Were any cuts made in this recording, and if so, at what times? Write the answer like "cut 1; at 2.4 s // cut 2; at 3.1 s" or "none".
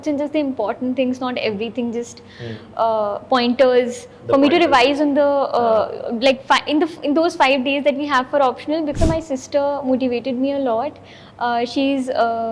cut 1; at 8.9 s